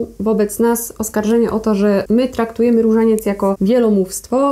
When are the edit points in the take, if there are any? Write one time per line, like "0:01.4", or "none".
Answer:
0:02.0
0:03.6